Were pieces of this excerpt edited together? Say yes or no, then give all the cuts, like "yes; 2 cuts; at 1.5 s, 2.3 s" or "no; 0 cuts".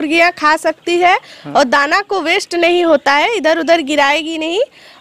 no; 0 cuts